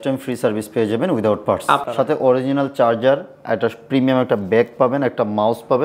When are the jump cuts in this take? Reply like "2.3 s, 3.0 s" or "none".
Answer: 1.8 s